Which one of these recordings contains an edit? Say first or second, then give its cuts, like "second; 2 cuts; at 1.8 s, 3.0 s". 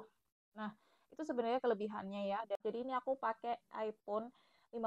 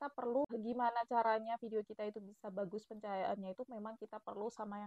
first; 1 cut; at 2.6 s